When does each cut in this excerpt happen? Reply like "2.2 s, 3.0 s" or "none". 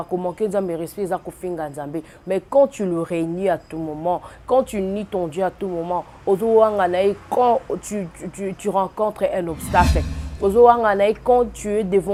none